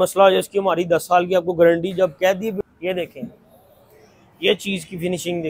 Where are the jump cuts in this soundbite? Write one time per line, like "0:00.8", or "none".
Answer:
0:02.6